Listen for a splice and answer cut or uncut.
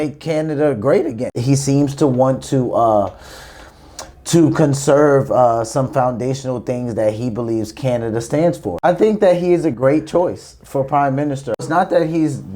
cut